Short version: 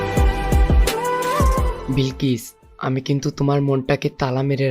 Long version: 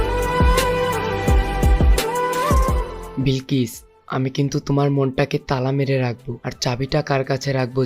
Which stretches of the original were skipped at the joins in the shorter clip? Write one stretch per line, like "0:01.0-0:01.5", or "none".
0:02.9-0:03.1